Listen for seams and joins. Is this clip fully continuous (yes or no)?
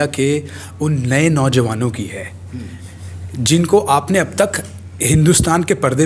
yes